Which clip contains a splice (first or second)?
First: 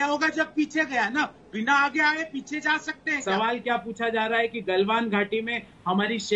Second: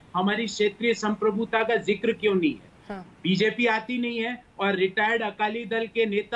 first